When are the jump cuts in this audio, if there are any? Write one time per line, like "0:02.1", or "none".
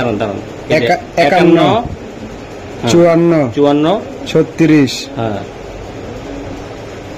none